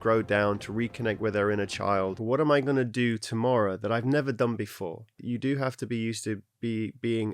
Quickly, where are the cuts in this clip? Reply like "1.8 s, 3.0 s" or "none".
2.2 s, 5.2 s